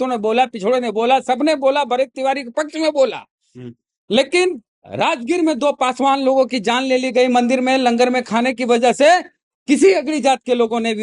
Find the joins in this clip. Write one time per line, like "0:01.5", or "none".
none